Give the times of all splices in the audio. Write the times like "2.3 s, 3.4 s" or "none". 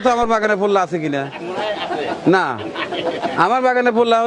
none